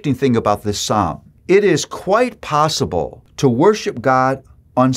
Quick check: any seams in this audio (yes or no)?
yes